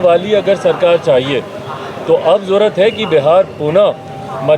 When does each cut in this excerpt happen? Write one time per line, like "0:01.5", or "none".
none